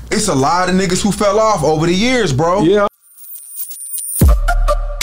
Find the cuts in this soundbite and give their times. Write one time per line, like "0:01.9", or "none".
0:02.9